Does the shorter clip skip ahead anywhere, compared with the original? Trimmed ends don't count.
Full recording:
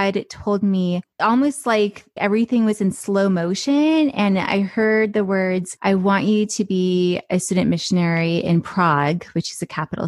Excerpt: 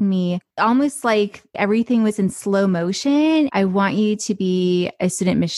yes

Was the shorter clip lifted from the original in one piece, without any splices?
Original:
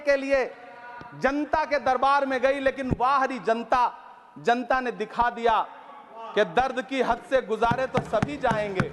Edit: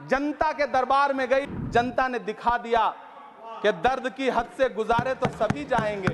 no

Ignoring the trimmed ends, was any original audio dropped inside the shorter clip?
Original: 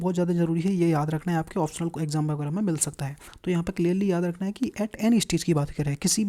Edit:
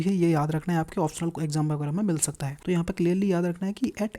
yes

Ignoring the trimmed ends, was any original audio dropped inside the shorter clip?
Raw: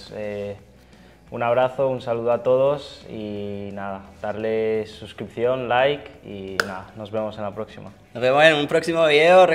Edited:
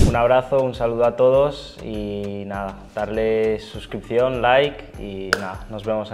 no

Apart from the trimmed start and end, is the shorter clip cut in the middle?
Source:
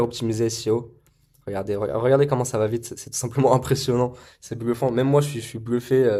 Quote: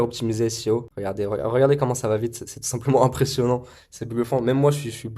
yes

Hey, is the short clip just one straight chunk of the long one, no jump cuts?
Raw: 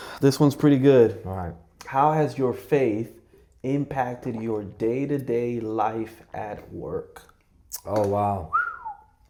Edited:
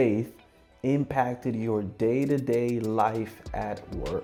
yes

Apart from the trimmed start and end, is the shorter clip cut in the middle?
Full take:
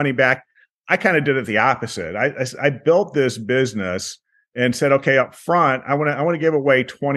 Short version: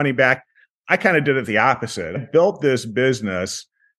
yes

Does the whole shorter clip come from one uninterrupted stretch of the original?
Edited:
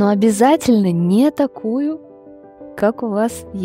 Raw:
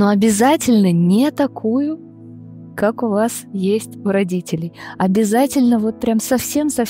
yes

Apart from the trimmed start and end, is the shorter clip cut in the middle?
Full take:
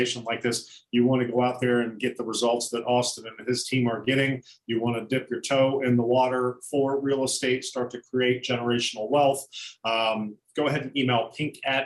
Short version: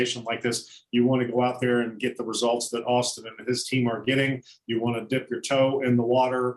no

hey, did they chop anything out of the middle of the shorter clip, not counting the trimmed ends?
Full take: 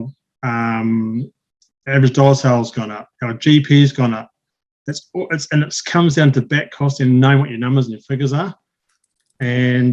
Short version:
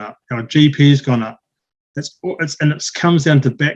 no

